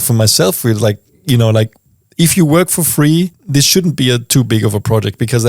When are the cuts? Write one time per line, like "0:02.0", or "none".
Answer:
0:03.4

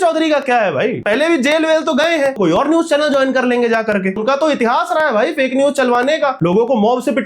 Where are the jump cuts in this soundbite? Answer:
0:01.0
0:02.4
0:04.2
0:06.4

